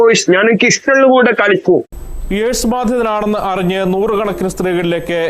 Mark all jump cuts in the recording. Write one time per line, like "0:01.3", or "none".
0:02.0

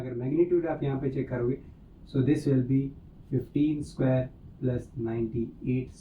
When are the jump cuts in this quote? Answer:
none

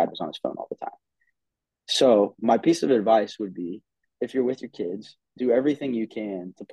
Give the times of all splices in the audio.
none

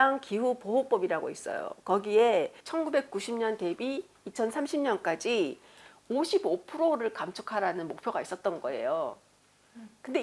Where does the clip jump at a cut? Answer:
0:02.6

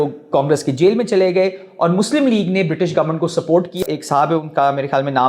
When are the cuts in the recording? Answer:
0:03.8

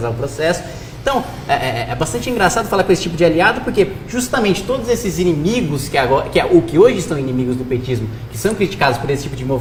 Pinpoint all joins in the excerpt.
none

